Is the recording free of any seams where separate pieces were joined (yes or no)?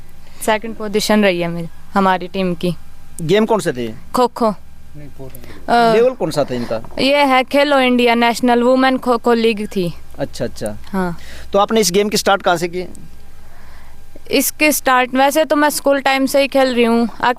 yes